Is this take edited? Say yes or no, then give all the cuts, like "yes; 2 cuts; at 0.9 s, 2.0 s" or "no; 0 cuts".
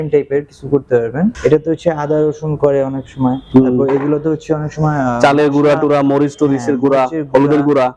yes; 2 cuts; at 1.3 s, 3.4 s